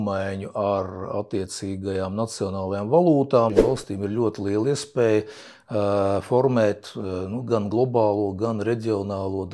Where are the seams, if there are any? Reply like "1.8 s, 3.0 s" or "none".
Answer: 3.6 s